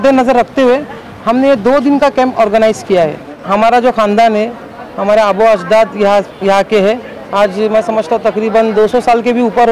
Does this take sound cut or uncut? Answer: cut